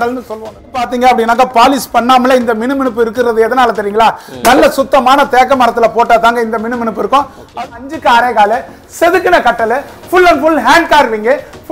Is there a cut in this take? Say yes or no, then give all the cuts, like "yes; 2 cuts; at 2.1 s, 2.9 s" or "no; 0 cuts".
yes; 2 cuts; at 0.9 s, 7.6 s